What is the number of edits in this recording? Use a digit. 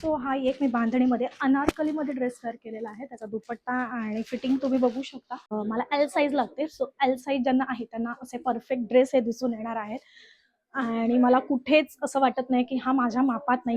1